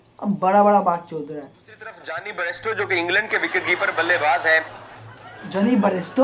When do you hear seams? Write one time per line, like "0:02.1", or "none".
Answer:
0:02.1